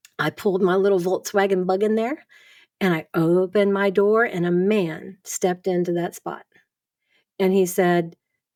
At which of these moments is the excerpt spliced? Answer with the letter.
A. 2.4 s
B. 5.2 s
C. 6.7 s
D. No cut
D